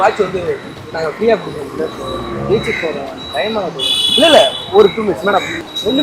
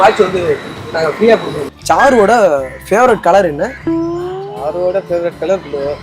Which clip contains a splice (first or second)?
second